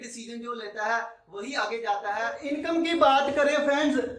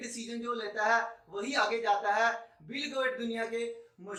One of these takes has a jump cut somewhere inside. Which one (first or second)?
first